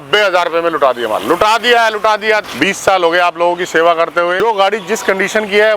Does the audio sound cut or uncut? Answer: cut